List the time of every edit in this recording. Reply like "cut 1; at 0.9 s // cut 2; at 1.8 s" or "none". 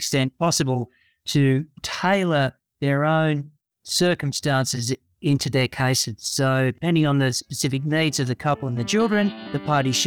cut 1; at 1.8 s // cut 2; at 6.8 s